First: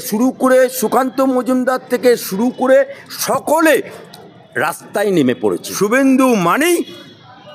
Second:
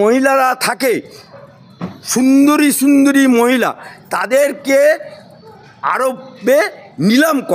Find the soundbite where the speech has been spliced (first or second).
first